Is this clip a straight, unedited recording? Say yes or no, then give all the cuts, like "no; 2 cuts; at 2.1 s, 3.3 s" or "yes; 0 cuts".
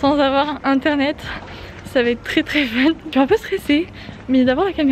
yes; 0 cuts